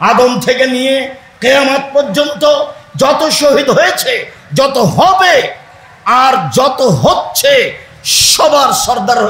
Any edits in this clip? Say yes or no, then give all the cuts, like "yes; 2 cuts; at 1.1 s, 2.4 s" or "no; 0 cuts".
no; 0 cuts